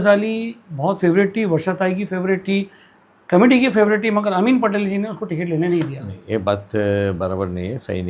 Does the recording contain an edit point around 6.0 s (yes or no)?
no